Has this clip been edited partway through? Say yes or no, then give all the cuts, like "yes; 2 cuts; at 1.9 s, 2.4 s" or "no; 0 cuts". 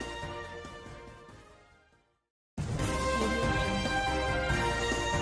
no; 0 cuts